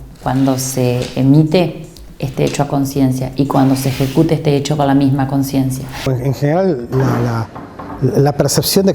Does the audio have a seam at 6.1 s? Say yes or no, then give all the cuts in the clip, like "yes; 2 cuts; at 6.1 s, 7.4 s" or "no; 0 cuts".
yes; 1 cut; at 6.1 s